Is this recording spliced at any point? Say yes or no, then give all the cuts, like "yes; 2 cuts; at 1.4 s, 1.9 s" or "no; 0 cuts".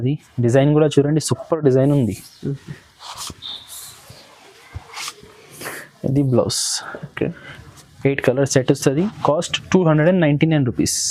no; 0 cuts